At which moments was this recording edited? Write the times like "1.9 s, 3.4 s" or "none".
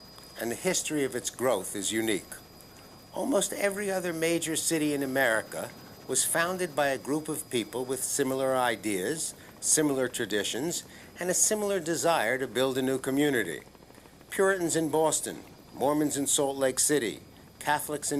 5.8 s